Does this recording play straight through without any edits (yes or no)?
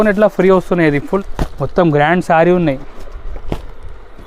no